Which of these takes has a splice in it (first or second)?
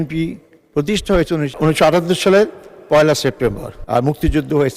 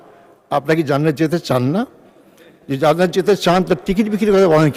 first